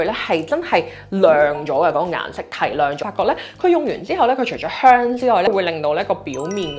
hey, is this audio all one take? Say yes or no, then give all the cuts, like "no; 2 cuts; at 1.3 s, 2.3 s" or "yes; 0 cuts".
no; 2 cuts; at 3.0 s, 5.5 s